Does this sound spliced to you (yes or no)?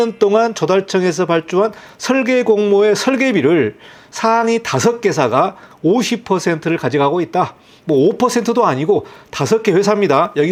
no